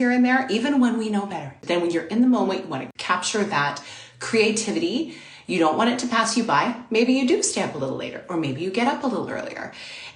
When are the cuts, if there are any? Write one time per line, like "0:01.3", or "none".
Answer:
0:01.5
0:02.9